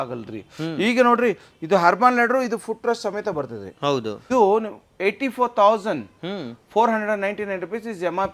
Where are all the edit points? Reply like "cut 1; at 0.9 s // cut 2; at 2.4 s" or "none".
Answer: cut 1; at 4.3 s